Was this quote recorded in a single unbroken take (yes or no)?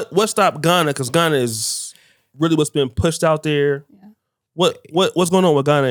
yes